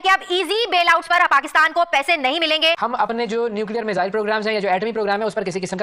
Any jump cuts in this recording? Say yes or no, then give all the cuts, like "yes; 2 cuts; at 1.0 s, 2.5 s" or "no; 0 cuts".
yes; 1 cut; at 2.8 s